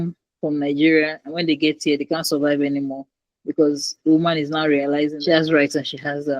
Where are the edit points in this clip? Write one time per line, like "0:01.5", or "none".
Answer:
0:05.2